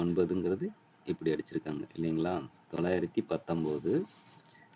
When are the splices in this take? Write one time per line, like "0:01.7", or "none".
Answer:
none